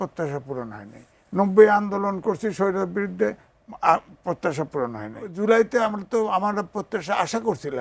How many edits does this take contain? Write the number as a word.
one